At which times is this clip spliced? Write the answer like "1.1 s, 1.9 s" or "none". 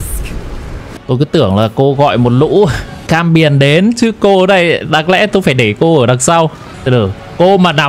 1.0 s, 3.0 s, 6.7 s